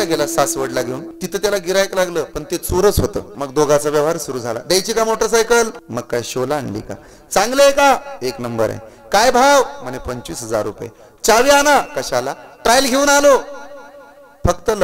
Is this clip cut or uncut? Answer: cut